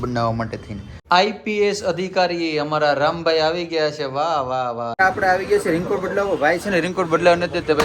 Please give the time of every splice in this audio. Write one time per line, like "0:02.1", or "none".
0:01.0
0:05.0